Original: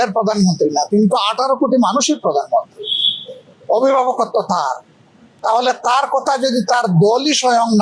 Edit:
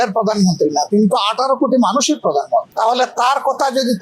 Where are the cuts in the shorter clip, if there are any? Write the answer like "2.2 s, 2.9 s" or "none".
2.7 s